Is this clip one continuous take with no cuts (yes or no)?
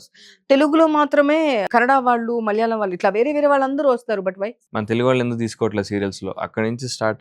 no